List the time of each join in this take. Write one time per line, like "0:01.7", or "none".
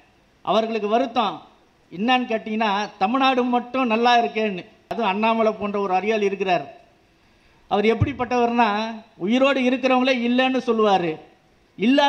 0:04.9